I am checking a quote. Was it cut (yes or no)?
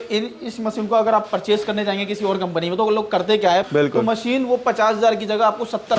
yes